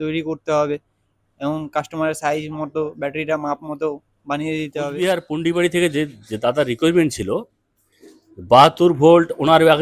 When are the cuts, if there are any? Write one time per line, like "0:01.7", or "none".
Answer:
0:04.9